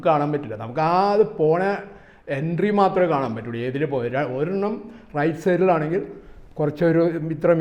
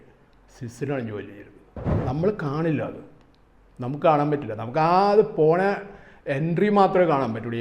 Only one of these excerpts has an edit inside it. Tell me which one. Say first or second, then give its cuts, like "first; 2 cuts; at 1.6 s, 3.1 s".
second; 1 cut; at 1.9 s